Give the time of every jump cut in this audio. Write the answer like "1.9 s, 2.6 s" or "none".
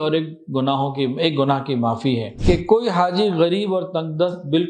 2.3 s